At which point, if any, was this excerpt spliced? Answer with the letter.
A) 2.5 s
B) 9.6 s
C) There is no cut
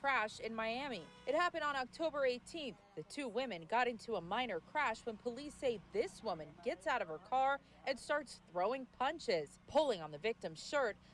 B